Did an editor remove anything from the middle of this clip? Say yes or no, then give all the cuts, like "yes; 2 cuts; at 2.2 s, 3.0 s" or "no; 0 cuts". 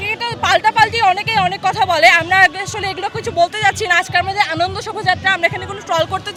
no; 0 cuts